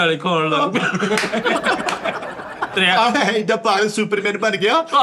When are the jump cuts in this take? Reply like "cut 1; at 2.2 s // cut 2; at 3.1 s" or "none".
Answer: cut 1; at 2.7 s